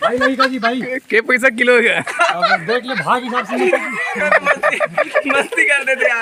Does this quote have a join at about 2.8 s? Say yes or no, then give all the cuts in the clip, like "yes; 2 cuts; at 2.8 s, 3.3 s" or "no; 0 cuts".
no; 0 cuts